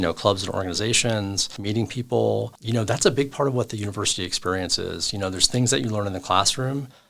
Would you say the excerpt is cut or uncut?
cut